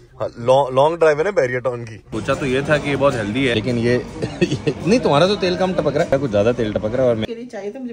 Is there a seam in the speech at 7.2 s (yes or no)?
yes